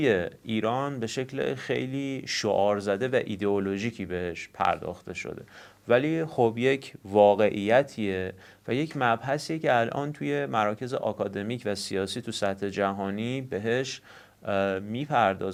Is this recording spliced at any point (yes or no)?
no